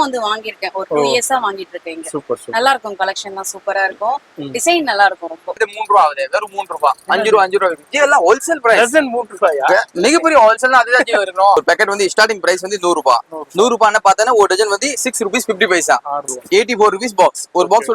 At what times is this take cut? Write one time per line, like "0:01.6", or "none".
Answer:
0:05.6
0:11.6
0:16.2